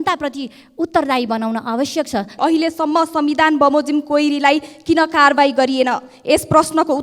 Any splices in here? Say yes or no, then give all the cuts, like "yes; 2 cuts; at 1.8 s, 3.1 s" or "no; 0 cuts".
yes; 1 cut; at 2.4 s